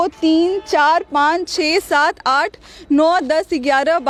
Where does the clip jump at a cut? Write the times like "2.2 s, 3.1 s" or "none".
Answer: none